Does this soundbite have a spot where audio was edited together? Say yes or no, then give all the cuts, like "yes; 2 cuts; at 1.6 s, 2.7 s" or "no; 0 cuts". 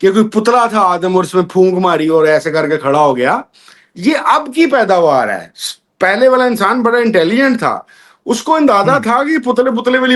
no; 0 cuts